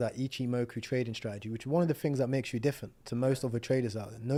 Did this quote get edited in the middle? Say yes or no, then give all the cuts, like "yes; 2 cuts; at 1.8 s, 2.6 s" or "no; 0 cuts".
no; 0 cuts